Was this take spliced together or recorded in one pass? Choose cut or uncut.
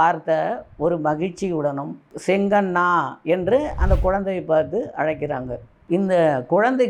cut